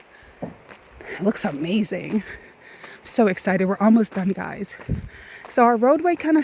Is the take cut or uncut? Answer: uncut